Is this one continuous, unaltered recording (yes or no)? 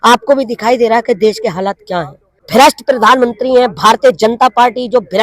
no